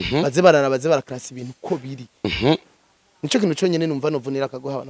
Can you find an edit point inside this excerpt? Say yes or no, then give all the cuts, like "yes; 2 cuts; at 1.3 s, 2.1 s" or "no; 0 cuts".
no; 0 cuts